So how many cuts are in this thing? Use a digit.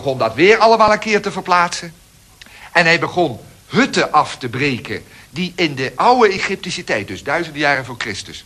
1